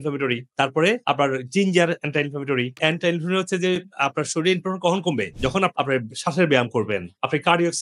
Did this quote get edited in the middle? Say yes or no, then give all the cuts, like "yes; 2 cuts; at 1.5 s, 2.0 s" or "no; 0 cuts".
no; 0 cuts